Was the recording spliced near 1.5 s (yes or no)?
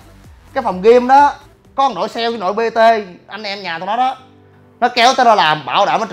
yes